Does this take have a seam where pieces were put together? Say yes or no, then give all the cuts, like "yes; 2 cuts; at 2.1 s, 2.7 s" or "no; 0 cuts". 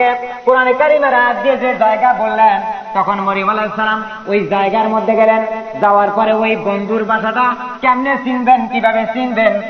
no; 0 cuts